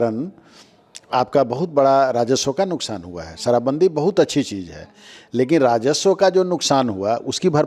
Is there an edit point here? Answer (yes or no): no